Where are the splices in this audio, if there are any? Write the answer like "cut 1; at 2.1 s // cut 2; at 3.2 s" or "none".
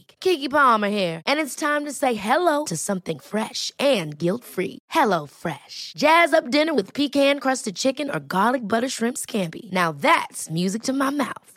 none